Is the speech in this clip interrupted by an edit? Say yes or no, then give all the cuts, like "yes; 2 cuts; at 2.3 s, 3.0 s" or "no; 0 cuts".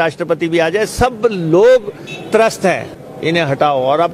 yes; 1 cut; at 2.9 s